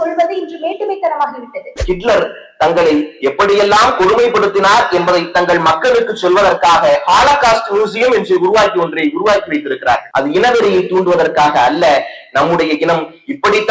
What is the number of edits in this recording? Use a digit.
1